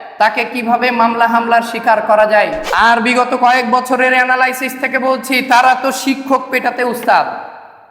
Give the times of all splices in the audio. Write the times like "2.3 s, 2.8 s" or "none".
2.6 s